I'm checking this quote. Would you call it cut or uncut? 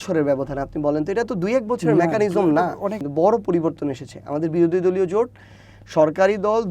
cut